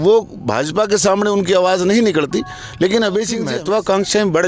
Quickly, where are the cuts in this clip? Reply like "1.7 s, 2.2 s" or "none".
3.4 s